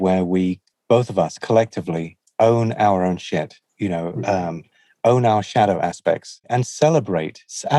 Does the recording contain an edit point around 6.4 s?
yes; 1 cut; at 6.4 s

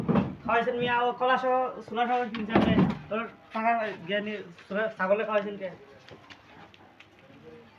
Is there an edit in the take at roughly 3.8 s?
no; 0 cuts

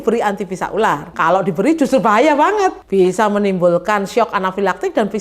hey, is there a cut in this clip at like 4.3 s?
no; 2 cuts; at 1.1 s, 2.8 s

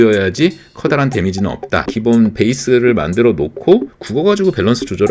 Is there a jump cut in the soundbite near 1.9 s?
yes; 1 cut; at 1.9 s

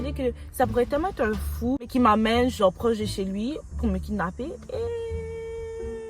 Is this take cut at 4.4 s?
no; 1 cut; at 1.9 s

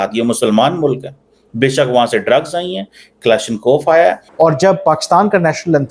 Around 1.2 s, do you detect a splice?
no; 1 cut; at 4.2 s

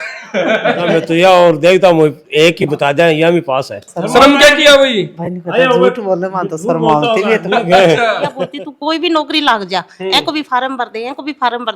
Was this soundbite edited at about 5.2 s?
no; 3 cuts; at 0.9 s, 3.9 s, 8.4 s

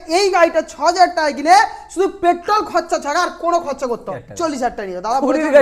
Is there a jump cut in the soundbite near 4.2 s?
yes; 1 cut; at 4.2 s

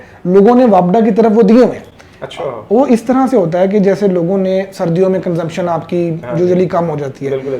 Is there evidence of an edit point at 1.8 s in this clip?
no; 0 cuts

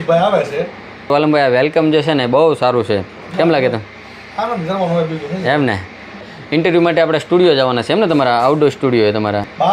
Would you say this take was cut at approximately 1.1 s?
no; 0 cuts

